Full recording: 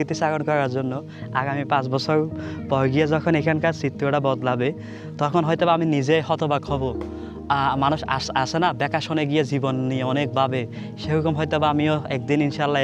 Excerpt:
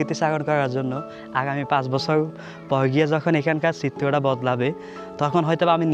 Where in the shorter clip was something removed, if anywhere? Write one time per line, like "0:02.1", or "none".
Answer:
none